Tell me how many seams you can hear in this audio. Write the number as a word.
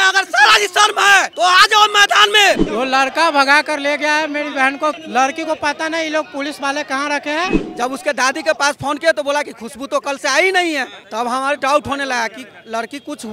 three